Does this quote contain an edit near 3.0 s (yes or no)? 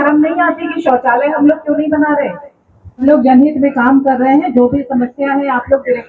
yes